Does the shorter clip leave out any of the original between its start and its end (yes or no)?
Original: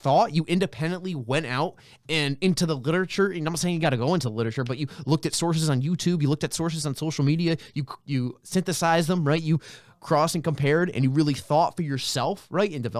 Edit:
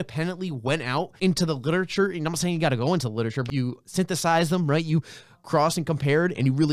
yes